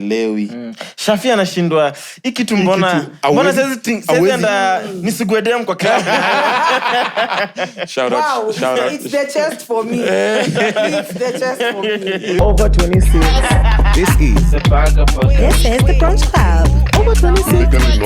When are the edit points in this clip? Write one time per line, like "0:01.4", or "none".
0:12.4